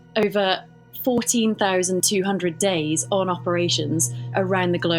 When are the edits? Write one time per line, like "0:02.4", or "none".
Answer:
none